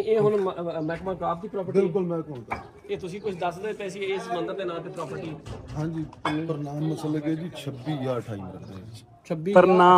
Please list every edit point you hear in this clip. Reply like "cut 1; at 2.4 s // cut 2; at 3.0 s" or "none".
none